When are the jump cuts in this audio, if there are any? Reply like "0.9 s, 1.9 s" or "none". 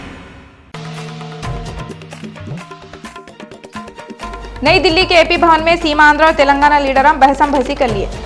4.2 s

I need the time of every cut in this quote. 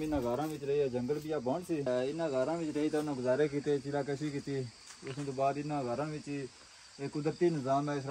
1.8 s

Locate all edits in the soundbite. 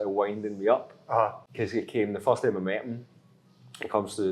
1.4 s

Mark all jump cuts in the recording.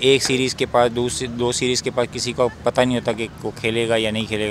none

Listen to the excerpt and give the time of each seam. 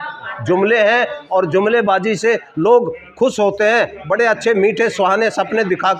none

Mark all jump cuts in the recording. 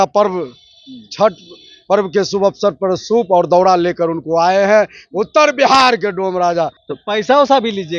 6.9 s

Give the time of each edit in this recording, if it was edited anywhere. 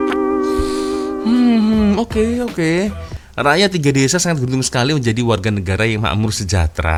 none

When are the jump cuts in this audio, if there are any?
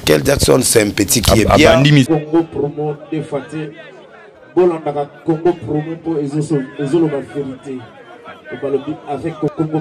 2.1 s

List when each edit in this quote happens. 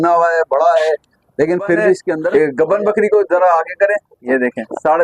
2.3 s

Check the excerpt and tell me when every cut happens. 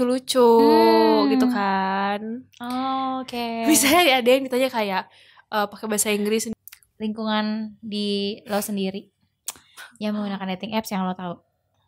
6.5 s

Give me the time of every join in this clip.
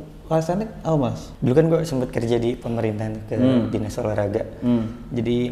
1.3 s

